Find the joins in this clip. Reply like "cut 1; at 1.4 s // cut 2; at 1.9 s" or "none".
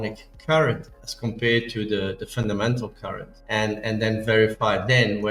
none